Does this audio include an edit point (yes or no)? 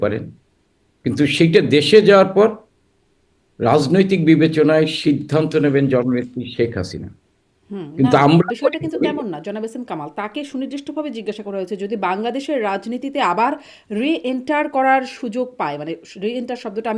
no